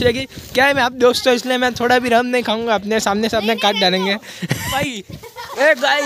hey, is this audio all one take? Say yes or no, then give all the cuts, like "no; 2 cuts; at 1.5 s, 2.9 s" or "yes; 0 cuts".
no; 1 cut; at 4.7 s